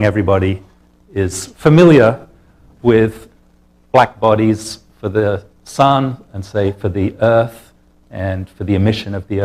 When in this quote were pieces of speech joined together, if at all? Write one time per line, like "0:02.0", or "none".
0:01.2